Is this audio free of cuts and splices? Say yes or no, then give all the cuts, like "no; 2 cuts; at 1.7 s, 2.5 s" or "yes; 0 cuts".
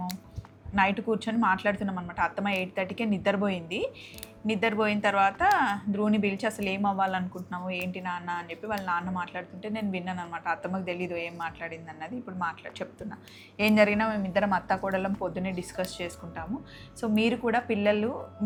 yes; 0 cuts